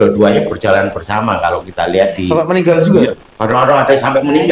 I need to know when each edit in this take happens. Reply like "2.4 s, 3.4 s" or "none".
none